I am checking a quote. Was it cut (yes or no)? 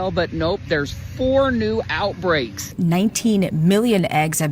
yes